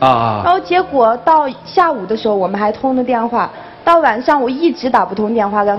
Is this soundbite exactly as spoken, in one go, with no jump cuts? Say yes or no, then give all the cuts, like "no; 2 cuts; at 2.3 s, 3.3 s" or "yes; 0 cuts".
yes; 0 cuts